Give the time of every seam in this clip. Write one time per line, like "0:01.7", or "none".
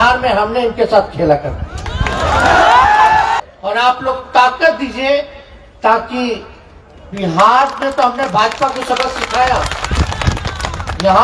0:03.4